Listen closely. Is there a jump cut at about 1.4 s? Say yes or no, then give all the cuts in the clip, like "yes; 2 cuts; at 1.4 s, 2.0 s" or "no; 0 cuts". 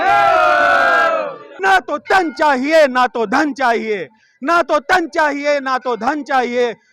yes; 1 cut; at 1.4 s